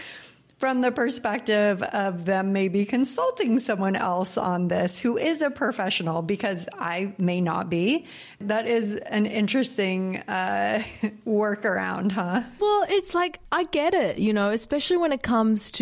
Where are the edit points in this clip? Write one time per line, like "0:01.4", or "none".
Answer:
0:08.3
0:12.6